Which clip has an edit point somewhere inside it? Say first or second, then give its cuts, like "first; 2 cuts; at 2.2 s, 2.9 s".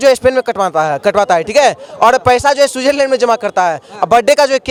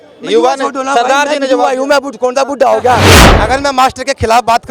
second; 1 cut; at 3.3 s